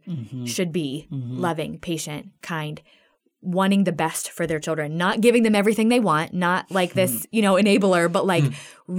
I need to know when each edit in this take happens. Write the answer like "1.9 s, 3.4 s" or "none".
none